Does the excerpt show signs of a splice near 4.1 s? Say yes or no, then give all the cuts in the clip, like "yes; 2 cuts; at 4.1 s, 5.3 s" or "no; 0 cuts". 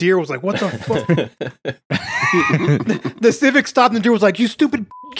no; 2 cuts; at 0.9 s, 2.8 s